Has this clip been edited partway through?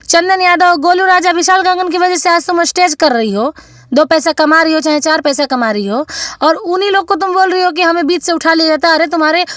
no; 0 cuts

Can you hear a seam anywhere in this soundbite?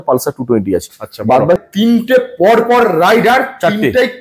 yes; 1 cut; at 1.6 s

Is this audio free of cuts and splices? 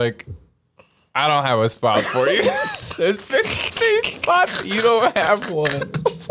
yes; 0 cuts

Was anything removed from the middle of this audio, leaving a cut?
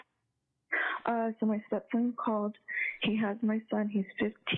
yes; 1 cut; at 1.1 s

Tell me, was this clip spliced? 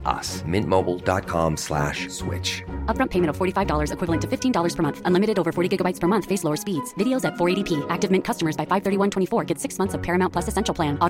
no; 0 cuts

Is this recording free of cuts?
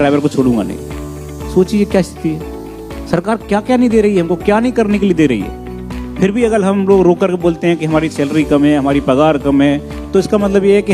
yes; 0 cuts

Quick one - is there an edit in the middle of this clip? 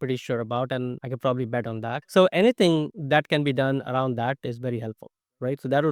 yes; 3 cuts; at 1.0 s, 2.0 s, 3.0 s

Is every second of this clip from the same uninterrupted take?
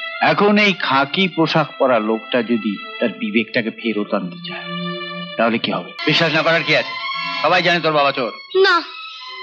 no; 1 cut; at 5.9 s

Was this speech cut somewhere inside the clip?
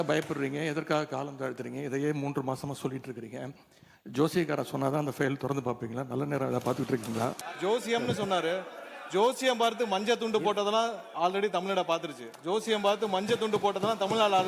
yes; 1 cut; at 7.4 s

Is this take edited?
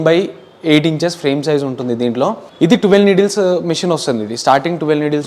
yes; 1 cut; at 2.5 s

